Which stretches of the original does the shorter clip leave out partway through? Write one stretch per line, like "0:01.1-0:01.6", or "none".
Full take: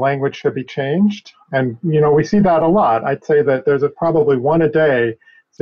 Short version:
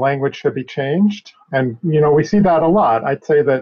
none